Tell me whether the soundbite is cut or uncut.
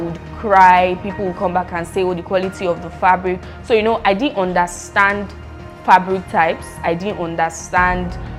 uncut